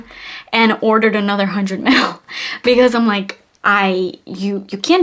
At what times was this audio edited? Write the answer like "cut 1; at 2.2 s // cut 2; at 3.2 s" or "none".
none